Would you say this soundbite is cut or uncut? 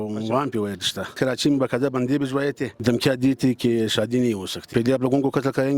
cut